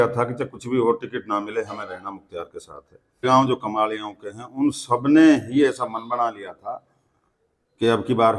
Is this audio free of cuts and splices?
no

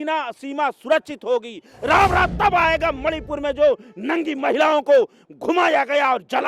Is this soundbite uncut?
no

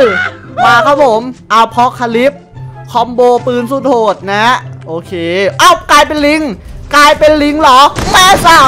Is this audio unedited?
yes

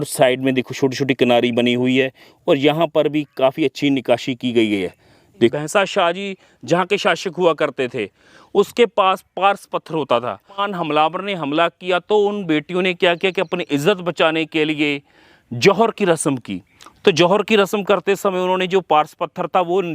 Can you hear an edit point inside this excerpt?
yes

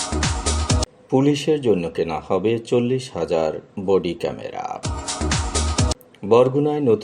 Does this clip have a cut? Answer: no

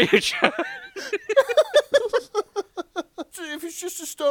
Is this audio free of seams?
no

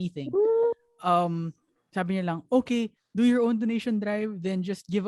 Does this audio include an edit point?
no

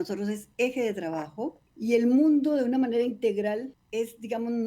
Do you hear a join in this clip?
yes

